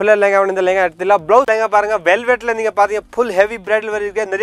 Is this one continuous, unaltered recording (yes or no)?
no